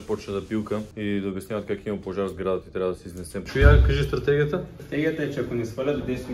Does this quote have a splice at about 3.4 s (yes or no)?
yes